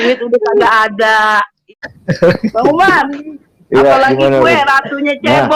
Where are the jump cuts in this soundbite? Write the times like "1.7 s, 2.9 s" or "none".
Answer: 1.7 s